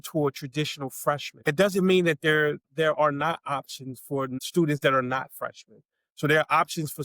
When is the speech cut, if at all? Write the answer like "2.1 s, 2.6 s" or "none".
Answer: 1.3 s, 2.7 s, 4.3 s